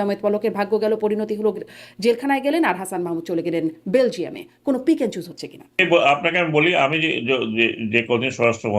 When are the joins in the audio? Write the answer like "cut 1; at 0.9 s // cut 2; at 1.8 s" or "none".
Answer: cut 1; at 5.8 s